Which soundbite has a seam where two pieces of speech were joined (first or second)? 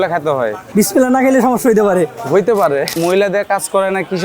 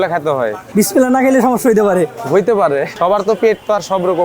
first